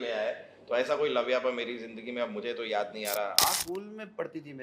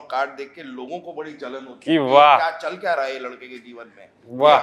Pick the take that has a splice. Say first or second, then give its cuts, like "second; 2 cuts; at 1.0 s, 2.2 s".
first; 1 cut; at 3.4 s